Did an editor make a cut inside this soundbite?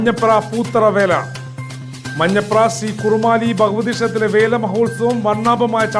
no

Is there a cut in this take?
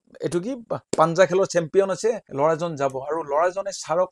yes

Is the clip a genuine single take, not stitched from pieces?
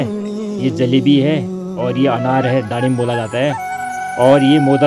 yes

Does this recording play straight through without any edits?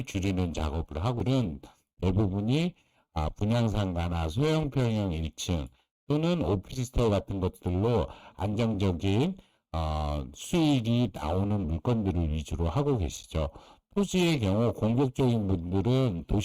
no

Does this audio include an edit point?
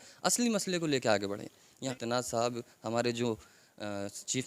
yes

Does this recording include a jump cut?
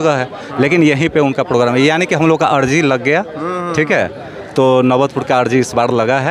no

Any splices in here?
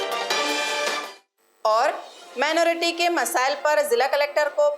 no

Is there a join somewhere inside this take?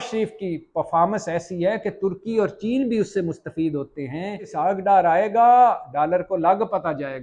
yes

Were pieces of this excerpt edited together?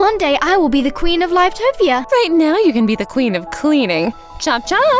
yes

